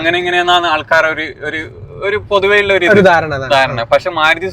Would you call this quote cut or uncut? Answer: uncut